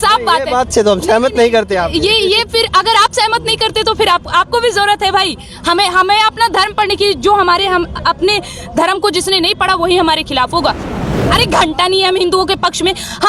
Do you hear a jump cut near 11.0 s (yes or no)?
yes